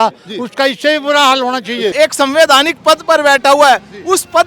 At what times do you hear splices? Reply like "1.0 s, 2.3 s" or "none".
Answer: 1.9 s